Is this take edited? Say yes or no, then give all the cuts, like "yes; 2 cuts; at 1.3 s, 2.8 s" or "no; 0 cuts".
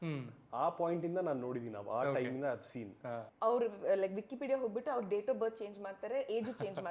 yes; 1 cut; at 3.3 s